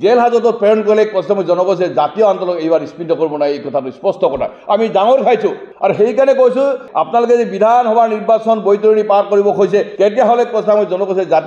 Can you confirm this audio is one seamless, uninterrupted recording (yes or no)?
no